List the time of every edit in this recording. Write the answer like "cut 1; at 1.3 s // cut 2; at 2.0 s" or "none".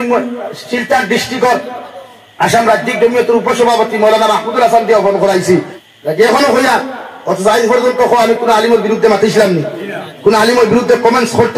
cut 1; at 5.7 s

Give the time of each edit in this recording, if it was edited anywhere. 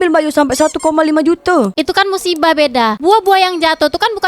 cut 1; at 1.7 s

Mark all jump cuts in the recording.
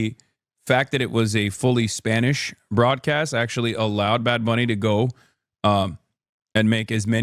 none

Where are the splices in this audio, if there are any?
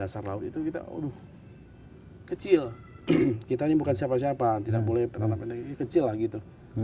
none

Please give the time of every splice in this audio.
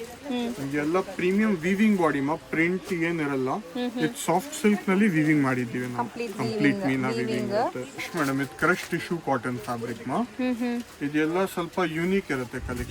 cut 1; at 8.1 s

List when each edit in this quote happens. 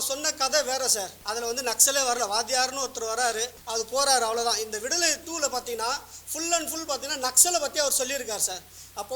cut 1; at 1.2 s // cut 2; at 3.6 s

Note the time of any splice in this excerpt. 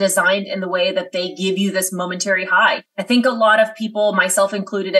cut 1; at 2.9 s

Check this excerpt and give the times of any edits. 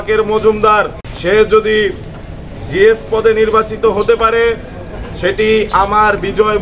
cut 1; at 1.0 s

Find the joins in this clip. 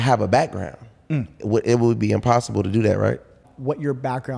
cut 1; at 3.5 s

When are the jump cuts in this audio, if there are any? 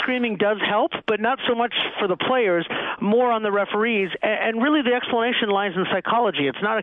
none

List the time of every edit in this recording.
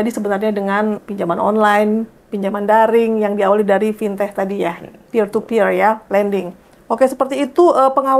cut 1; at 1.0 s

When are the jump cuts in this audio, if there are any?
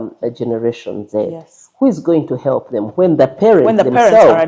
none

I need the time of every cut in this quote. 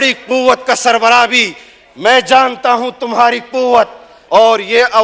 cut 1; at 4.1 s

